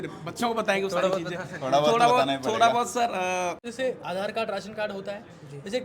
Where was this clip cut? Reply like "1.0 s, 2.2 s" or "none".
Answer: 3.7 s